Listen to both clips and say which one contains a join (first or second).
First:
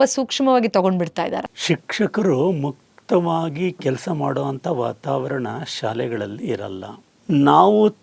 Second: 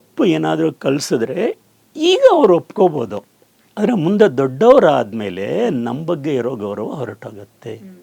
first